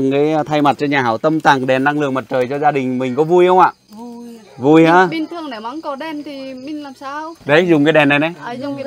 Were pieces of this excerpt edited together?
no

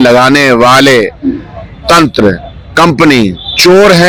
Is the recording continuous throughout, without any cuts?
yes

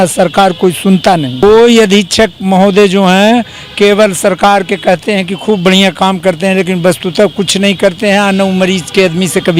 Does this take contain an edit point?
yes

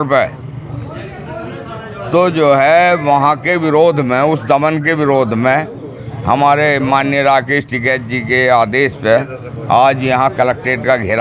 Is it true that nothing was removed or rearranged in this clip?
yes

